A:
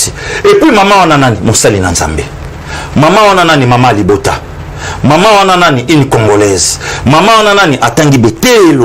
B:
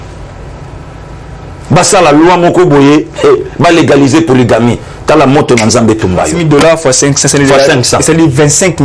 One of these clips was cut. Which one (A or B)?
B